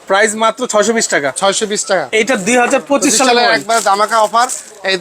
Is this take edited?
yes; 1 cut; at 2.1 s

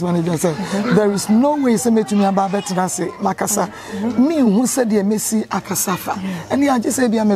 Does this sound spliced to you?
no; 0 cuts

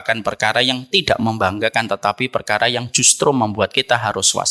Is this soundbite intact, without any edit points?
yes; 0 cuts

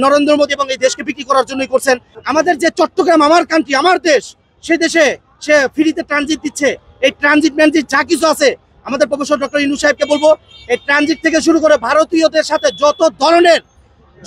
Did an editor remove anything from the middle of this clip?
yes; 1 cut; at 2.1 s

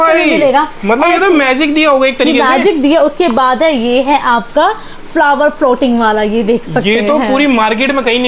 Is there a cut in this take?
no; 0 cuts

